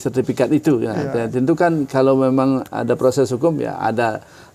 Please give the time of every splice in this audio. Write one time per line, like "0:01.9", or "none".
none